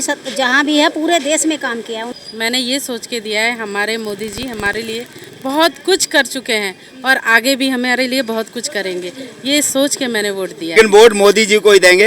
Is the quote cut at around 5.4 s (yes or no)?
no